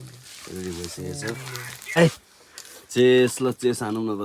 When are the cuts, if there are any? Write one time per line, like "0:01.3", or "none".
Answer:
0:02.0